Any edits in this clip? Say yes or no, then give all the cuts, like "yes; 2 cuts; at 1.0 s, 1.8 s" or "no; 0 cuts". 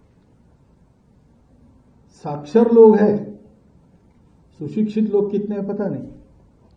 no; 0 cuts